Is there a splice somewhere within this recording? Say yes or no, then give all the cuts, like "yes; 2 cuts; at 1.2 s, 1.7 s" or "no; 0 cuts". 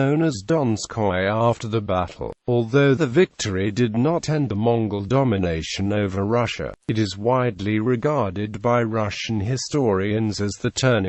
yes; 1 cut; at 4.7 s